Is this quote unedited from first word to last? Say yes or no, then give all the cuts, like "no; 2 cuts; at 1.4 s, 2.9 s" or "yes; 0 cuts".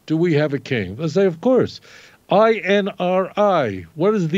yes; 0 cuts